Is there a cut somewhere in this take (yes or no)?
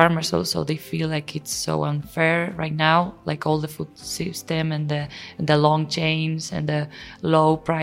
no